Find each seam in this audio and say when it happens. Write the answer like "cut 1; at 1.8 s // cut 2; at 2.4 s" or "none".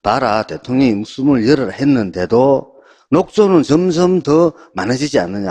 cut 1; at 1.5 s